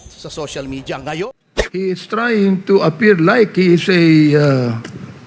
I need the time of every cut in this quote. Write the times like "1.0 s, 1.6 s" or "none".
1.3 s